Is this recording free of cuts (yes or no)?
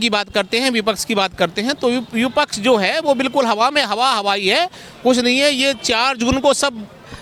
yes